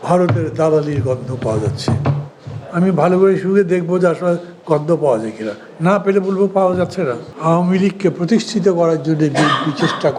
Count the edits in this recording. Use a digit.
0